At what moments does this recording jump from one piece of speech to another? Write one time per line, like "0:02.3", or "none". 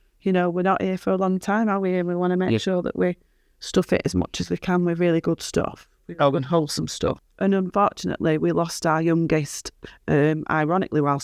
0:07.3